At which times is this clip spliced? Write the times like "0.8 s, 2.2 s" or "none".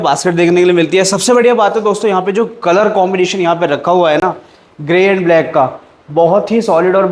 none